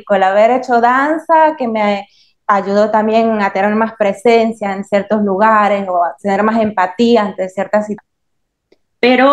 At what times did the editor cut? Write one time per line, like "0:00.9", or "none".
0:08.0